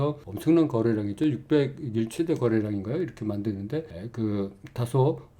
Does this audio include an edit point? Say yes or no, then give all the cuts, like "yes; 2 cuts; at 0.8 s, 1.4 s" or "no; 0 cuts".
no; 0 cuts